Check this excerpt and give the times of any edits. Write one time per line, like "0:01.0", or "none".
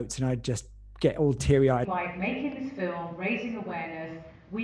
0:01.9